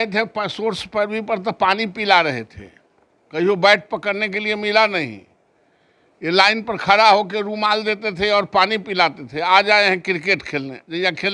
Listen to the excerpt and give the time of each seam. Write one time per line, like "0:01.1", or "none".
none